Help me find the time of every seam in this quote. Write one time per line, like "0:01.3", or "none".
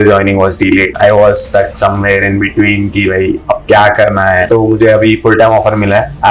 0:00.9
0:04.4